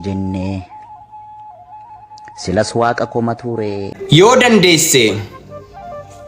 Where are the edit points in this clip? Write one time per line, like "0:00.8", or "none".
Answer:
0:03.9

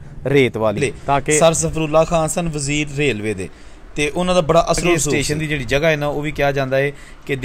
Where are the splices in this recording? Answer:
0:01.4
0:05.1

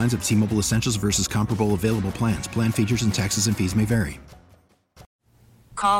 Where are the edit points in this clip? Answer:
0:05.0

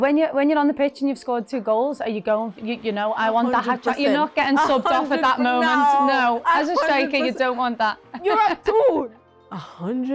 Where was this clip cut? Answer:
0:09.1

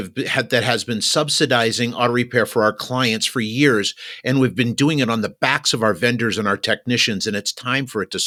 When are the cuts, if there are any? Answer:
none

